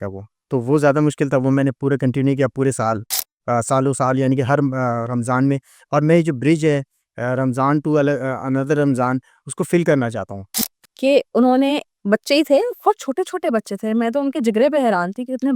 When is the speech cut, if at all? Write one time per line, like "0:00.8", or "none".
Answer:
0:10.5